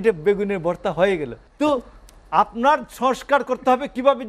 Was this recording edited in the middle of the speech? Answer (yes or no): yes